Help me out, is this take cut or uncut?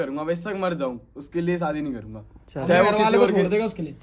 uncut